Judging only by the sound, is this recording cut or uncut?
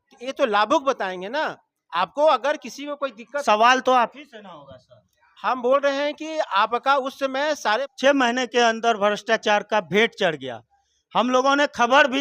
cut